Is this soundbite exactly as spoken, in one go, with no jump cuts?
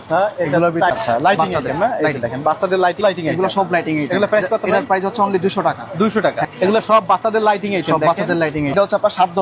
no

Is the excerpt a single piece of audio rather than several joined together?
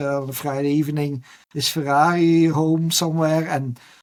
yes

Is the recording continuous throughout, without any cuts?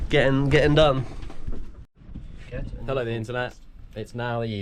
yes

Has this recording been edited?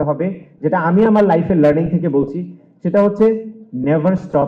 no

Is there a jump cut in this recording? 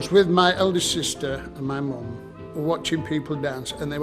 yes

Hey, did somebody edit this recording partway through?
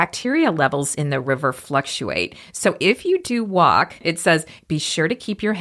yes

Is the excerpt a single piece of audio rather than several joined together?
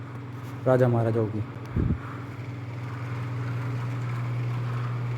yes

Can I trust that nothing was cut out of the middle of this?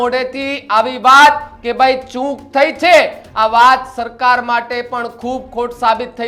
yes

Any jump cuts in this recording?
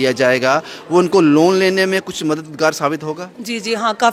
no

